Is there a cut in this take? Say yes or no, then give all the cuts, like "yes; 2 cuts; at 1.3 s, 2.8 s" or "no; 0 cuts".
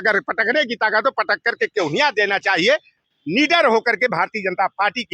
yes; 1 cut; at 3.0 s